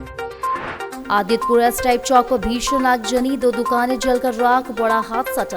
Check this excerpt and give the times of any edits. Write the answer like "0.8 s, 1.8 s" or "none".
1.0 s